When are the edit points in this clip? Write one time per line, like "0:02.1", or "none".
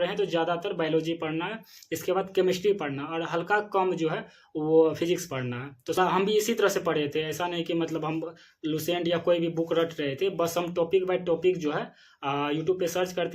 0:06.0